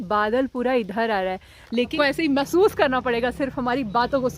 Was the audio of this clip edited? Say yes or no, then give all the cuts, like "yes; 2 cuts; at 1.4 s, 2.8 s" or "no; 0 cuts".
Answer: yes; 1 cut; at 1.9 s